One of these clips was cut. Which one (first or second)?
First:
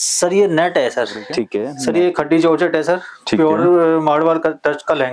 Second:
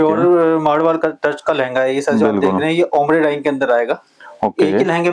first